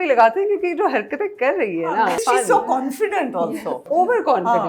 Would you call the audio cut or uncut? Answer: cut